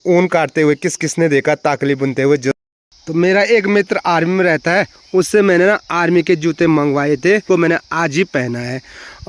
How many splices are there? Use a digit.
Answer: 2